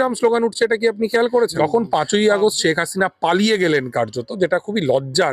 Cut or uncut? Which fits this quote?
cut